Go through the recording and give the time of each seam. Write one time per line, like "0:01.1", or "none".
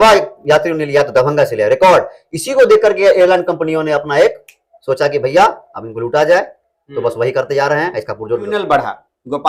0:08.5